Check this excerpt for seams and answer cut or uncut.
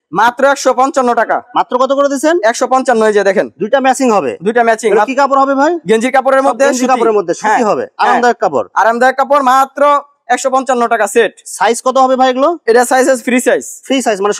uncut